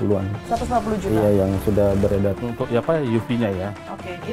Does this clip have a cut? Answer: yes; 1 cut; at 2.4 s

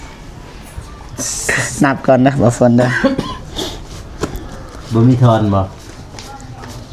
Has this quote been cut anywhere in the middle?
no; 0 cuts

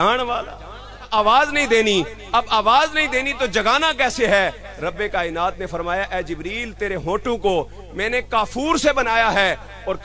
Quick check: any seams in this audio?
yes; 1 cut; at 1.1 s

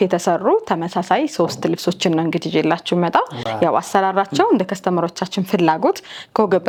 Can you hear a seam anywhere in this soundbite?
no; 0 cuts

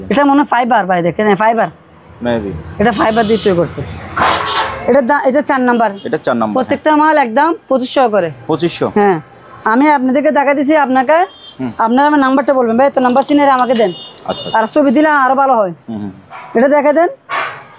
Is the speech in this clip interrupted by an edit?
no; 0 cuts

